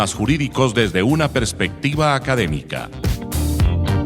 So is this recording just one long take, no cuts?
no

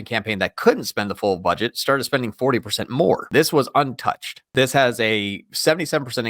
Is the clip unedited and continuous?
no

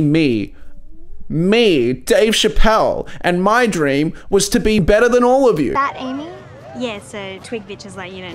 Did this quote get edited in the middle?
yes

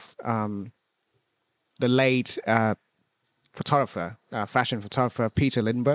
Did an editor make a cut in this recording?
no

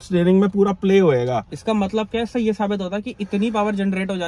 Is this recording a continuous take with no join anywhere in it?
yes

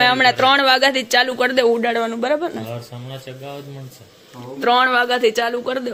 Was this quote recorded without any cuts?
yes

